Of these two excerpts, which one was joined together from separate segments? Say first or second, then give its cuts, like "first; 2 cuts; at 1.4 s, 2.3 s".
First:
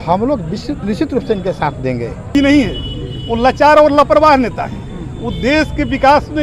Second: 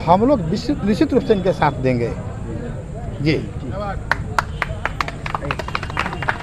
first; 1 cut; at 2.3 s